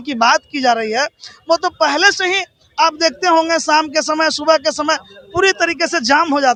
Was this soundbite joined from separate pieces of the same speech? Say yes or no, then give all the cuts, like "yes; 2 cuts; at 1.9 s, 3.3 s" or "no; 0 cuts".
no; 0 cuts